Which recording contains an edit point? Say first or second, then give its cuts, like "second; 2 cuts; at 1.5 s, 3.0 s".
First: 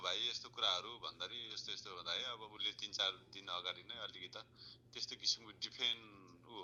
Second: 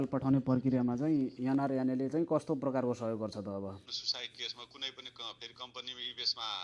second; 1 cut; at 4.0 s